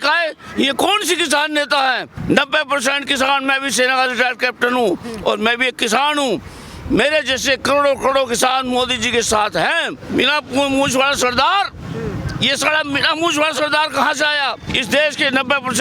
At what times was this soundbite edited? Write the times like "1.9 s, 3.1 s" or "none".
2.1 s, 10.0 s, 14.7 s